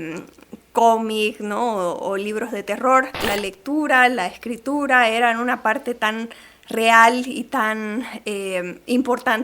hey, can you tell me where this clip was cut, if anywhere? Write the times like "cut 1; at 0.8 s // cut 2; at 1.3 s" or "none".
cut 1; at 3.2 s

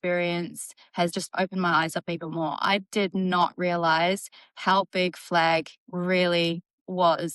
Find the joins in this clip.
cut 1; at 1.1 s

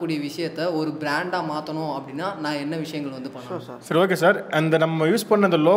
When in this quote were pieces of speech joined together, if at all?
cut 1; at 3.7 s

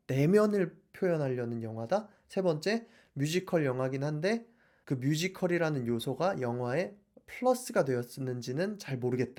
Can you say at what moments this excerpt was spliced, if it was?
none

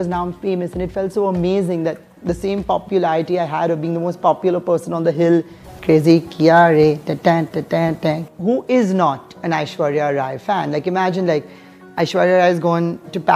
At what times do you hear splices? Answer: cut 1; at 5.7 s // cut 2; at 8.3 s

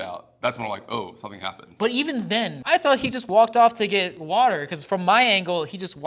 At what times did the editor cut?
cut 1; at 2.6 s

